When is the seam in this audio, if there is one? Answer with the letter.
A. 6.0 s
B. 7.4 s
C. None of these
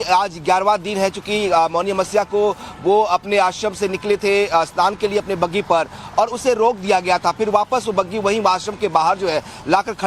C